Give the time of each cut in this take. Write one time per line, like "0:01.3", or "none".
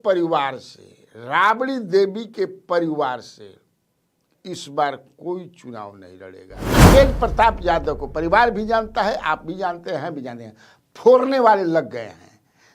0:06.7